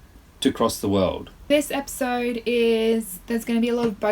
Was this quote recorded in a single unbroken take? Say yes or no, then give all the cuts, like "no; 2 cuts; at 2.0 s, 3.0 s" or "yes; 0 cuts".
no; 1 cut; at 1.5 s